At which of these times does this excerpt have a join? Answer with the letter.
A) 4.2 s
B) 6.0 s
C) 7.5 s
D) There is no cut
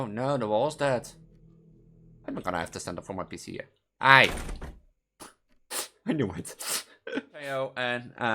C